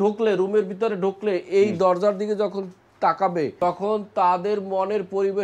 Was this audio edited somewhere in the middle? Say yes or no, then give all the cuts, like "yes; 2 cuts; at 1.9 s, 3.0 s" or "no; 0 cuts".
yes; 1 cut; at 3.6 s